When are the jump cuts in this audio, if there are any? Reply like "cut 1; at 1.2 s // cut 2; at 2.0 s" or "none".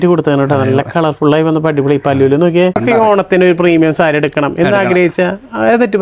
cut 1; at 2.8 s